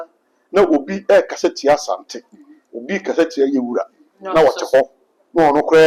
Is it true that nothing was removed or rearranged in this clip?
yes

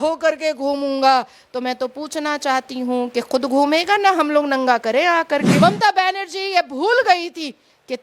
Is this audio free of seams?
no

